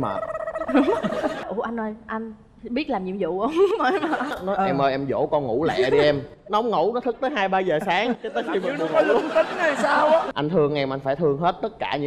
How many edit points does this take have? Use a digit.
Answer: 3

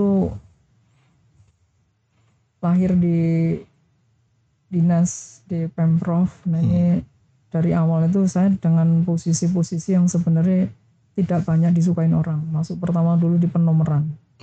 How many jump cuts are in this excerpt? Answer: 0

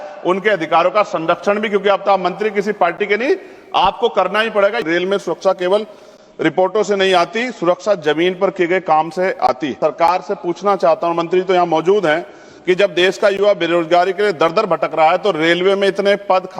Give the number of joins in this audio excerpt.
2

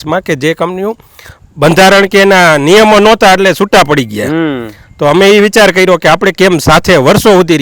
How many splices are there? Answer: 0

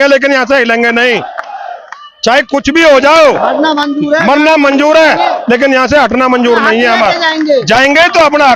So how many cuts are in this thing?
0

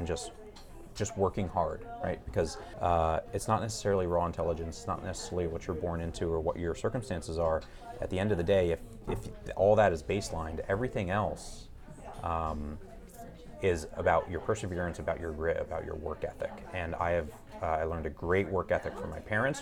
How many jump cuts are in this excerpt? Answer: 1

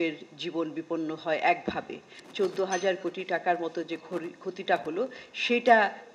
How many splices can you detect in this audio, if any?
1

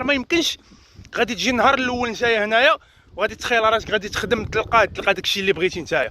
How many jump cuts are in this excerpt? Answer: 1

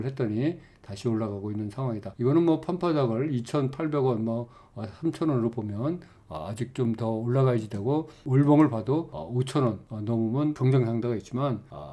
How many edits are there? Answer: 3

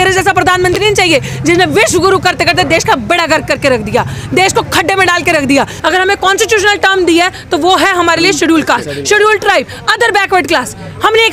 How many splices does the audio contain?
1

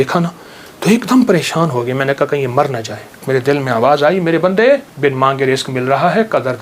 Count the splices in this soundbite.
2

